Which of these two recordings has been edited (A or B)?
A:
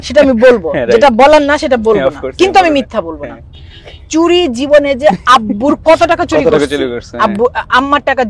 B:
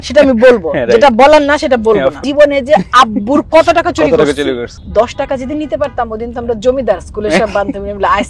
B